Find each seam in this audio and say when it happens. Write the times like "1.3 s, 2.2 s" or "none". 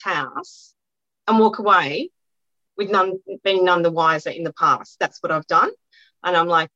none